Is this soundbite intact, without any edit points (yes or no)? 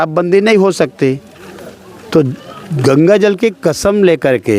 yes